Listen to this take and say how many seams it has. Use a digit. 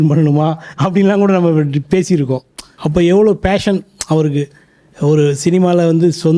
1